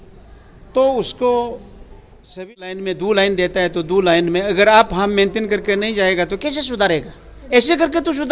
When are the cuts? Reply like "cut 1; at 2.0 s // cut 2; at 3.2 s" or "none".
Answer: cut 1; at 2.6 s